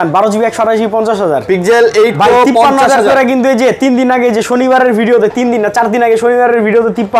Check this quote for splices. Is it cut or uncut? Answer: uncut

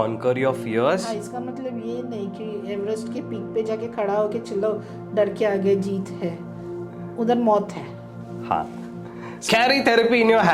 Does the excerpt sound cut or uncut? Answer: cut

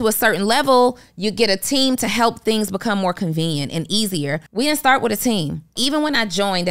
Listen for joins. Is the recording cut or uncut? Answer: cut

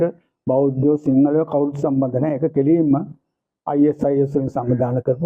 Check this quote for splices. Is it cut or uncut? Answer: uncut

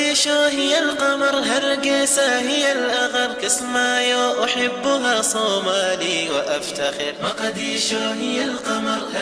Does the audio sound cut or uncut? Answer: uncut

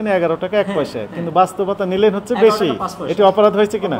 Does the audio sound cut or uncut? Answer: uncut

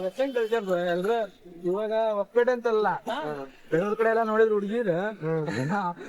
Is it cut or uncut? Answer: uncut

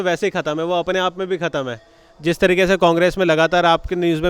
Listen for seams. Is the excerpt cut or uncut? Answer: uncut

